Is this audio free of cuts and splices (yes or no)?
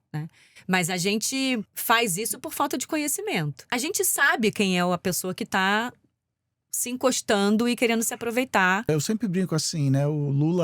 no